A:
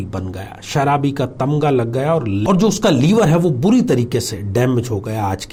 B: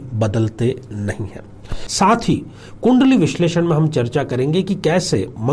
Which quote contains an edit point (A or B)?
B